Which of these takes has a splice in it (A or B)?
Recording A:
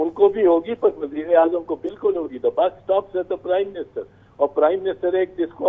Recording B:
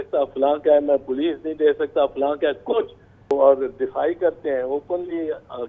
B